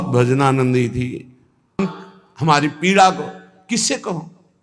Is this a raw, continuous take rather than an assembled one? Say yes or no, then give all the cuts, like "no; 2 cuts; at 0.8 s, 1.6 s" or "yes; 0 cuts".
no; 1 cut; at 1.8 s